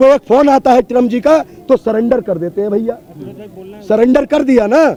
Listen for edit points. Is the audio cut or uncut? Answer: uncut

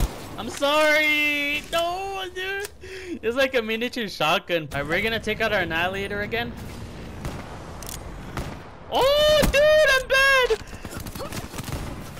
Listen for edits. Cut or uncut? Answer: cut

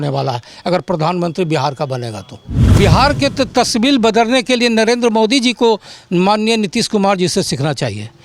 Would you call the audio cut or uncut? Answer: cut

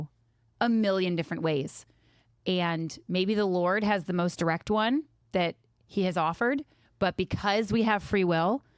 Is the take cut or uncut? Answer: uncut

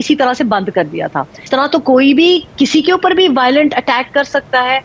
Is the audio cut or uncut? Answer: cut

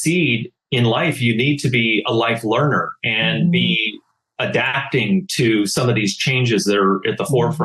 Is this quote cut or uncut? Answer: uncut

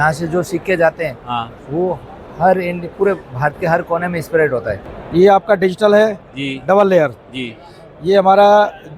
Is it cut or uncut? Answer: cut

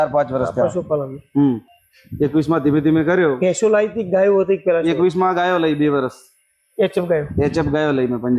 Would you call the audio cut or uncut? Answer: uncut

